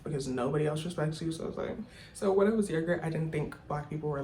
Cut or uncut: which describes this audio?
cut